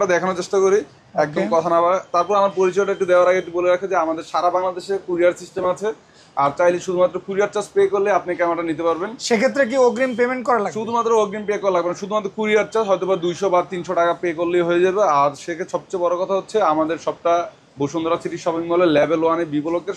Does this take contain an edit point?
no; 0 cuts

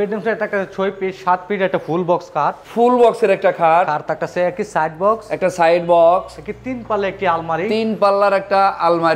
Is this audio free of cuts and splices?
yes; 0 cuts

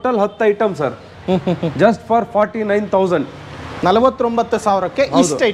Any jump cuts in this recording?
no; 0 cuts

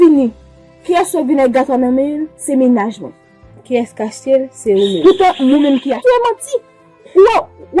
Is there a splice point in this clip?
yes; 1 cut; at 6.0 s

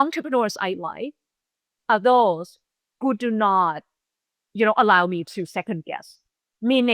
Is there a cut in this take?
no; 0 cuts

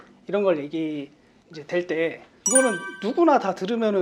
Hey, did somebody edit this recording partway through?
yes; 1 cut; at 2.3 s

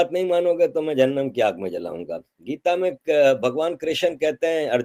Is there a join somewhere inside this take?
no; 0 cuts

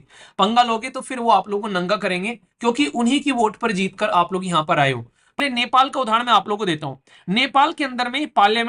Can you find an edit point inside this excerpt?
yes; 1 cut; at 5.4 s

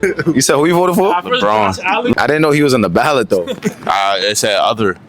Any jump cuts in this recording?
yes; 1 cut; at 2.1 s

